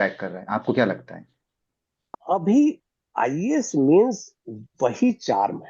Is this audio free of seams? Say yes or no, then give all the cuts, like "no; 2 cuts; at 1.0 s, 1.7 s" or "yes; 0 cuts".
no; 1 cut; at 2.1 s